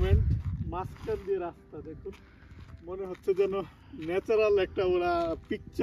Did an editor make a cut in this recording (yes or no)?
no